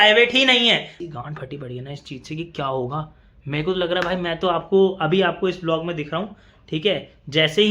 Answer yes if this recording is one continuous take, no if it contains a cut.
no